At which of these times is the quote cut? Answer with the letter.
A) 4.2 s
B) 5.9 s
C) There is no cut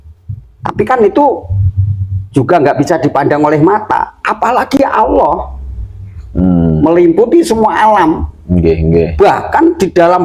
C